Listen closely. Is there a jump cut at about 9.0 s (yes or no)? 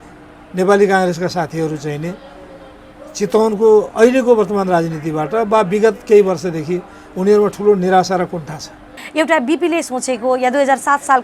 yes